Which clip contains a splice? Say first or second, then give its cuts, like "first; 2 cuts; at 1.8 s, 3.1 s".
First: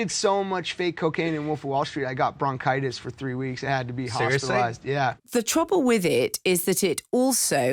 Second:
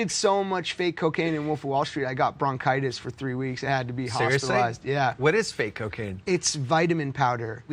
first; 1 cut; at 5.2 s